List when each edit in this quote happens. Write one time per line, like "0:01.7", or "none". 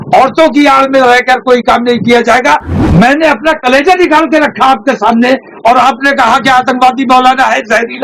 0:02.8